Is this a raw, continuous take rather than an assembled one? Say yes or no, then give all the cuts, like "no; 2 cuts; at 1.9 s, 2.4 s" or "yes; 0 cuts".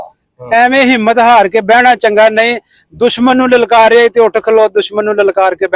yes; 0 cuts